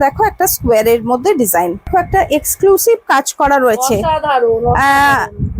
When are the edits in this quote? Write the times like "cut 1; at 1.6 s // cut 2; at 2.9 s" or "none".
cut 1; at 1.8 s